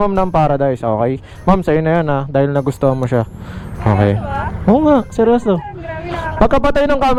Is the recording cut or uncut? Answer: uncut